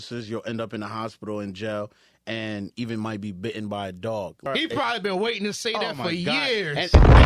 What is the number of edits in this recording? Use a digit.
1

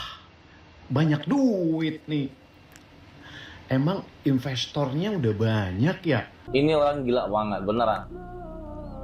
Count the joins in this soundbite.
1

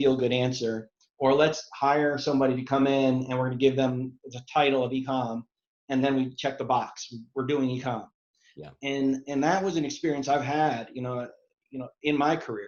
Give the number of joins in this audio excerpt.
0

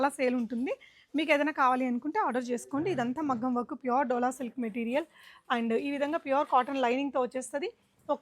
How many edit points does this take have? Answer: 0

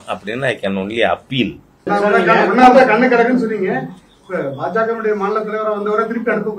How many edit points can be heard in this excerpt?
1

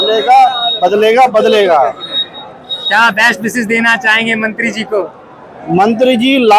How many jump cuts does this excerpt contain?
0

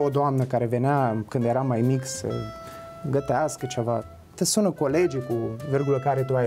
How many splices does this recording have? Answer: 1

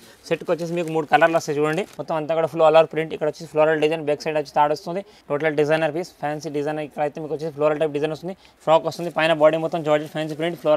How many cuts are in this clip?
3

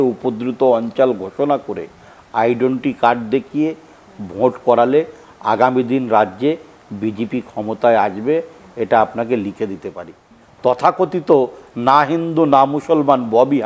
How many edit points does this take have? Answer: 1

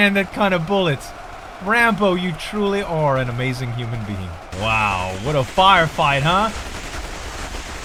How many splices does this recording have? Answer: 0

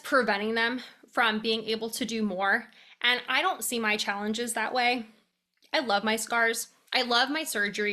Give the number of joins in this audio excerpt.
1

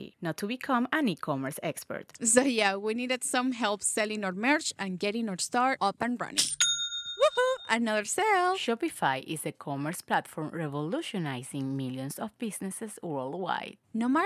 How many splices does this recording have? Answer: 0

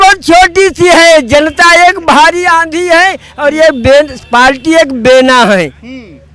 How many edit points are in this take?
0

